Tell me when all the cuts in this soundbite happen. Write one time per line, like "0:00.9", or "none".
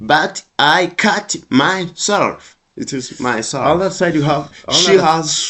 0:03.6